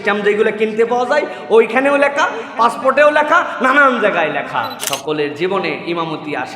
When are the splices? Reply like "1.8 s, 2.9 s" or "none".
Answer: 4.8 s